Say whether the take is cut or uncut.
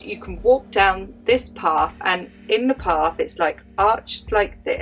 uncut